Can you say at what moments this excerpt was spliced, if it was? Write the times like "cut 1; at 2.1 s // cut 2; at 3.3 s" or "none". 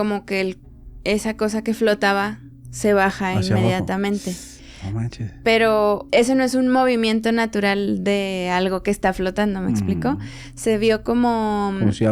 cut 1; at 6.0 s